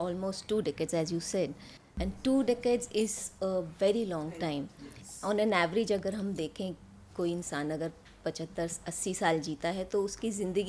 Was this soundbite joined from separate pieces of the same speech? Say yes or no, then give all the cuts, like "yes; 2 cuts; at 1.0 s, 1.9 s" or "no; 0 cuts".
no; 0 cuts